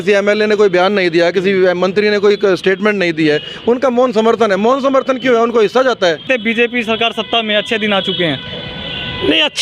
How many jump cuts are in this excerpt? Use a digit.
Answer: 1